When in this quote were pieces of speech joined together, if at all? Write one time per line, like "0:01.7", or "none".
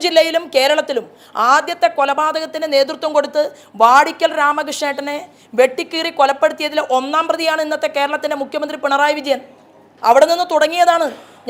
none